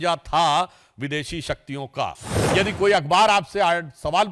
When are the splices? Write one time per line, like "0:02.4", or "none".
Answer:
0:02.3